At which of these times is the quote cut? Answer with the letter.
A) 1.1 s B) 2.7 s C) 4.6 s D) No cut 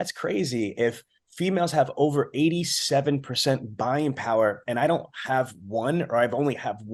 D